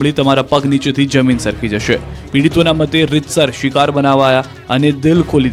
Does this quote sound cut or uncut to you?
uncut